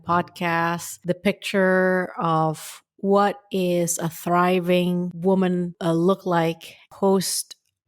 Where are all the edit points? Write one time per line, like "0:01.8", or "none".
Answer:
0:00.9
0:05.1
0:05.7
0:06.9